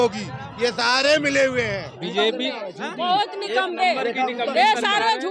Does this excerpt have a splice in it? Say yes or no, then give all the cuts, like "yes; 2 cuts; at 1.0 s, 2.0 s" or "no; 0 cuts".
yes; 1 cut; at 2.0 s